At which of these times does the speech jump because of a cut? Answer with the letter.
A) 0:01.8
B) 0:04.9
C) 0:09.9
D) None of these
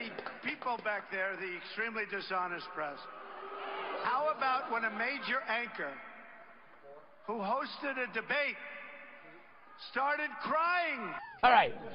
D